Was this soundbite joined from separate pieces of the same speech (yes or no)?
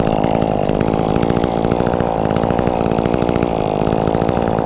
no